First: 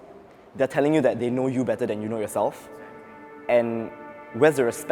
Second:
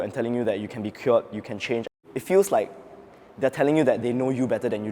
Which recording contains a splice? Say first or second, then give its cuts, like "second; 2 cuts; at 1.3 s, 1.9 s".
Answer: second; 1 cut; at 1.9 s